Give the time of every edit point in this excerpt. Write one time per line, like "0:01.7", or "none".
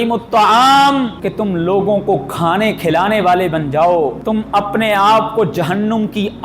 0:01.2
0:04.2